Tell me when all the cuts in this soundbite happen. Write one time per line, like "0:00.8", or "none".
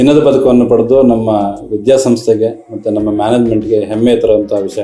none